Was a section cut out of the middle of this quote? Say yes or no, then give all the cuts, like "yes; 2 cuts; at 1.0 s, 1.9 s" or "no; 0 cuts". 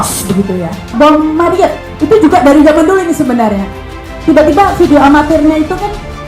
yes; 1 cut; at 0.9 s